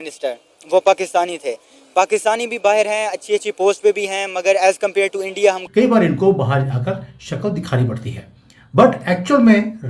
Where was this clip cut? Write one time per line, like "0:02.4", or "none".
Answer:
0:05.6